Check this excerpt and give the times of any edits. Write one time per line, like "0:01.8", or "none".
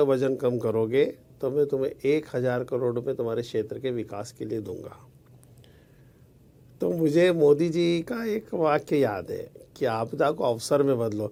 none